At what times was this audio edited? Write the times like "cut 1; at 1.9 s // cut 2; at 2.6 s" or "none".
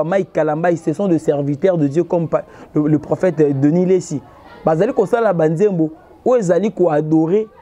none